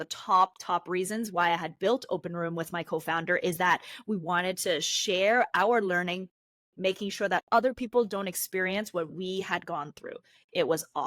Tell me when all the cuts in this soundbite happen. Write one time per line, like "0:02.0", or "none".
none